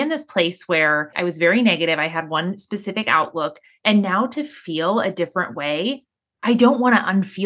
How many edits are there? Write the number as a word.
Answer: two